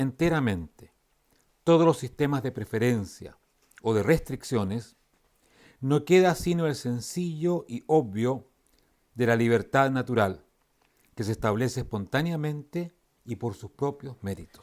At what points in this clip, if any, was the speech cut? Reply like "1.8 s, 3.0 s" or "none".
7.8 s